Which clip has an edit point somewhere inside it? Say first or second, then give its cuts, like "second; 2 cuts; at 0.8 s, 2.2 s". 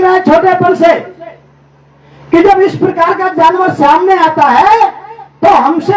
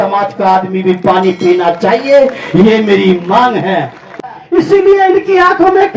second; 1 cut; at 4.2 s